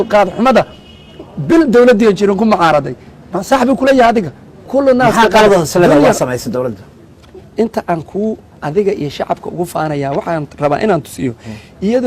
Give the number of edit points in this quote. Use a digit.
1